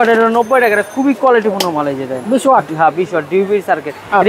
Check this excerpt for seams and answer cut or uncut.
uncut